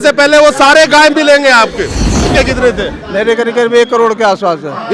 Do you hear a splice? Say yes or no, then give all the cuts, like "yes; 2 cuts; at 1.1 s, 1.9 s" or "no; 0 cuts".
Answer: yes; 1 cut; at 2.3 s